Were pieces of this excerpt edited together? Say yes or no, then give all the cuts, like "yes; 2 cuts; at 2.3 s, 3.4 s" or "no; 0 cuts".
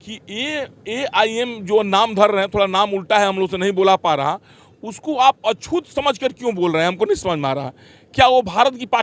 no; 0 cuts